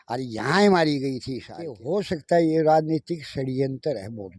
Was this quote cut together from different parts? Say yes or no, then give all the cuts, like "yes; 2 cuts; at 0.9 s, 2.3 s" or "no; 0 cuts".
yes; 1 cut; at 1.8 s